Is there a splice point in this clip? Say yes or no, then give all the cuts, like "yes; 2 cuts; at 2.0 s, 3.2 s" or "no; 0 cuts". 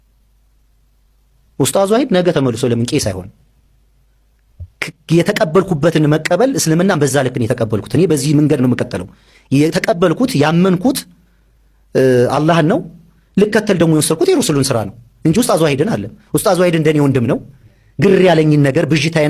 no; 0 cuts